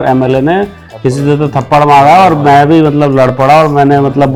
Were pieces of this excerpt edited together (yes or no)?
no